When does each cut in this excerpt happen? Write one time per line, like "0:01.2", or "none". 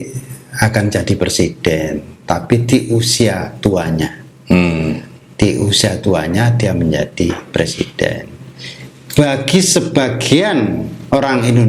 none